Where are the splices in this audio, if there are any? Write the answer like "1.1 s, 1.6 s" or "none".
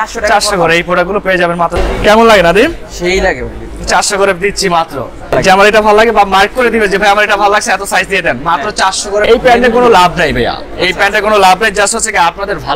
1.7 s, 5.3 s, 9.2 s